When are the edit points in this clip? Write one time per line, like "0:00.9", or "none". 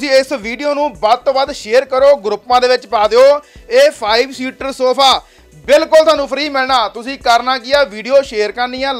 none